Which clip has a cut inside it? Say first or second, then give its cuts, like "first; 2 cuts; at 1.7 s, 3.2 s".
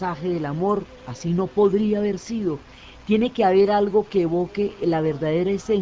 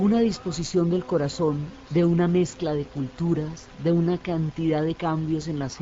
first; 1 cut; at 2.4 s